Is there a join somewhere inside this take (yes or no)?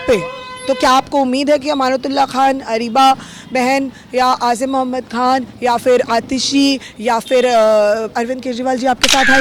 no